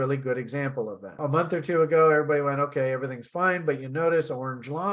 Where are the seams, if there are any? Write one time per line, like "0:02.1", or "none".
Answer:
0:01.2